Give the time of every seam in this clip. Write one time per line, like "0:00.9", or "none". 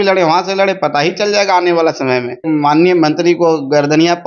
0:02.4